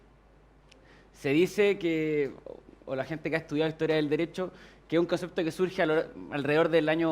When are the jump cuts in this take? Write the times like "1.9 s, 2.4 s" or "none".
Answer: 6.2 s